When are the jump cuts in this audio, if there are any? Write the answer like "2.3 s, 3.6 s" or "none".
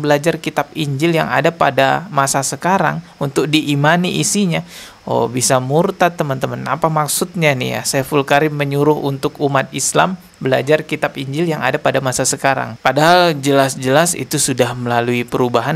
none